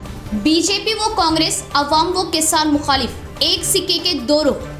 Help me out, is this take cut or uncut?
uncut